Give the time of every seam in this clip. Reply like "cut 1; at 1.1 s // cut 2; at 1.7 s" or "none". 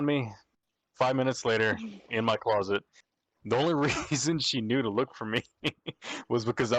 none